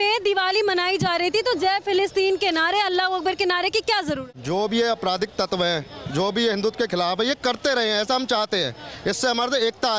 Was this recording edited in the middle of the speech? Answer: yes; 1 cut; at 4.2 s

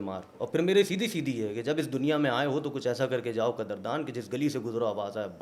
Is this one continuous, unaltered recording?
yes; 0 cuts

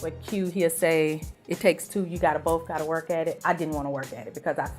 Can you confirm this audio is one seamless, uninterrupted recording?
yes; 0 cuts

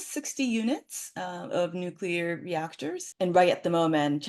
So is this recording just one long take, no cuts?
yes; 0 cuts

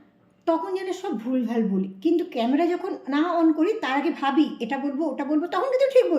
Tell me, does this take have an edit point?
no; 0 cuts

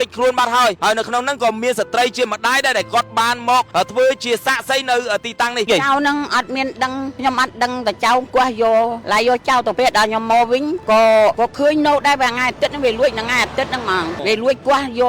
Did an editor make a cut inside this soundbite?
yes; 1 cut; at 5.7 s

